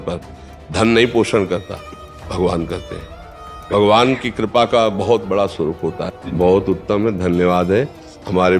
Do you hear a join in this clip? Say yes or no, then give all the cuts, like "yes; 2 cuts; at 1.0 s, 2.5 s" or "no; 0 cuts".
yes; 1 cut; at 6.2 s